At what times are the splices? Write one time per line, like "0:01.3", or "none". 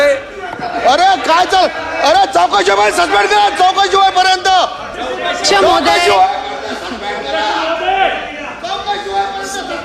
none